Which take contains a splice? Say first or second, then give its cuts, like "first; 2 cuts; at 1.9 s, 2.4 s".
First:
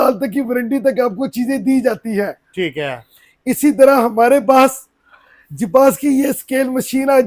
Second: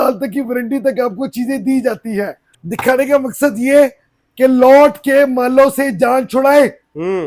second; 1 cut; at 2.4 s